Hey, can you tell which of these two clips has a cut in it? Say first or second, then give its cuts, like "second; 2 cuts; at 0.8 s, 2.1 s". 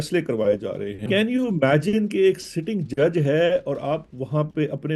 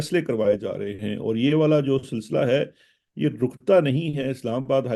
first; 1 cut; at 1.0 s